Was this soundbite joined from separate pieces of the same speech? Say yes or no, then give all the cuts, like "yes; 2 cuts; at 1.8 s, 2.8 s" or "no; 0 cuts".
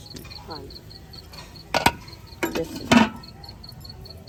no; 0 cuts